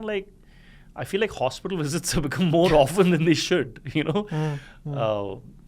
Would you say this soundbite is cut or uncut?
uncut